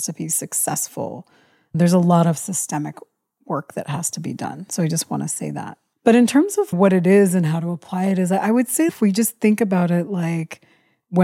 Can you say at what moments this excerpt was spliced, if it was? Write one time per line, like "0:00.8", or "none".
0:06.7
0:08.9